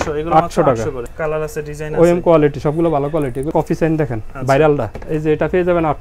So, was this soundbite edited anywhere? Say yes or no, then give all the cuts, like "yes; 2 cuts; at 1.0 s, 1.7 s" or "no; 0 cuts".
yes; 3 cuts; at 1.1 s, 3.5 s, 5.0 s